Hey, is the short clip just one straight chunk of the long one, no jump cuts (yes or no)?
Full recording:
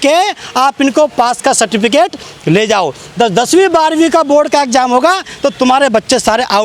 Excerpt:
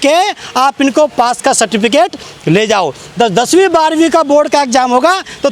yes